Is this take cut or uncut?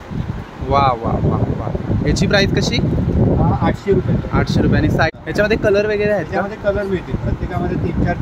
cut